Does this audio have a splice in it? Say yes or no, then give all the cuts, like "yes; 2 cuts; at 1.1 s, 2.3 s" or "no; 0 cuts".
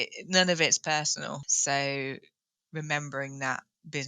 yes; 1 cut; at 1.5 s